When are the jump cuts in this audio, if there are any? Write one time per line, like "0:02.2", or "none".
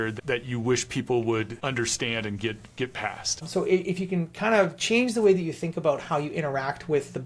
0:01.5
0:03.5